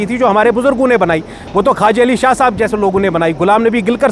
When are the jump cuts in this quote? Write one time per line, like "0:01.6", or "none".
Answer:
none

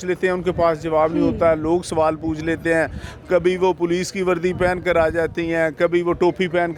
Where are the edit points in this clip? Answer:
none

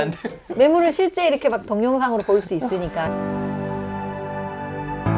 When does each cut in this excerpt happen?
0:03.0

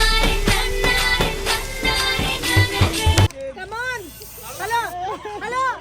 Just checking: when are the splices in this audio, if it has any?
0:03.3

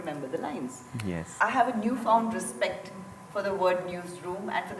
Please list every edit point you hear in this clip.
0:01.3

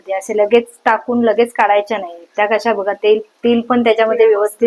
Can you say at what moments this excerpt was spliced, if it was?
none

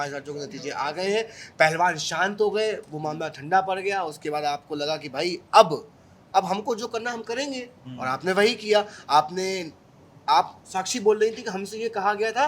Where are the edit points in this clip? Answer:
none

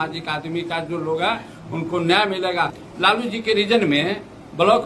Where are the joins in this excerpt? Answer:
0:02.8

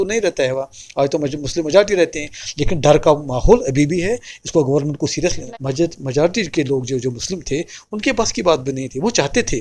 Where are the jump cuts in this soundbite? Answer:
0:05.5

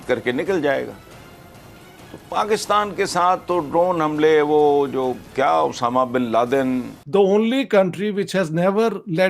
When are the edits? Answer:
0:06.9

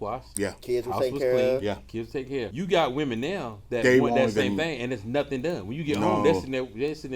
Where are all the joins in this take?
0:02.5

